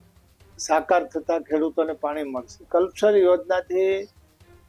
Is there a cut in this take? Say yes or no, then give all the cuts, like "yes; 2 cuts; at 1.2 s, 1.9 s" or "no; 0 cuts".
yes; 1 cut; at 2.7 s